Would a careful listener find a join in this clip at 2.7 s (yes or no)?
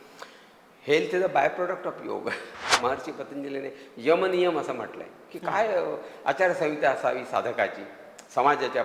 yes